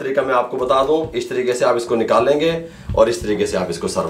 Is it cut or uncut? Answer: uncut